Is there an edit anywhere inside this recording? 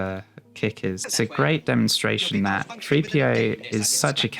yes; 1 cut; at 1.0 s

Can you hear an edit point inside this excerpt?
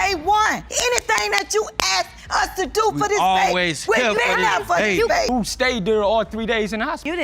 yes; 1 cut; at 5.3 s

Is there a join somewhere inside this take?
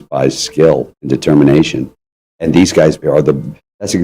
yes; 2 cuts; at 0.9 s, 3.0 s

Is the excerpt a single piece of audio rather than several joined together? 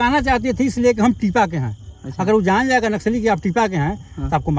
yes; 0 cuts

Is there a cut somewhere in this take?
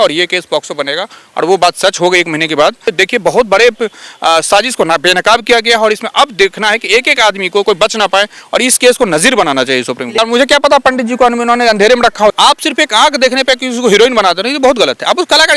yes; 3 cuts; at 2.8 s, 10.2 s, 12.3 s

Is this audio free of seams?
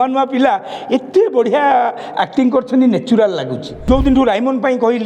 no; 1 cut; at 3.7 s

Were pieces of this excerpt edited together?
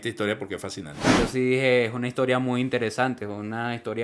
yes; 1 cut; at 1.0 s

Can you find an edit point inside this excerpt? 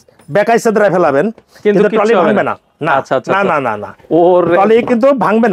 no; 0 cuts

